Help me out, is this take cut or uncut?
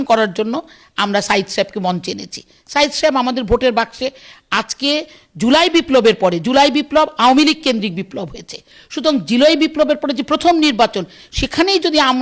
uncut